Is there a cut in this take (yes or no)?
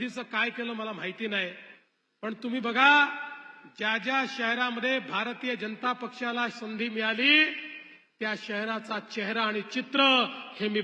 no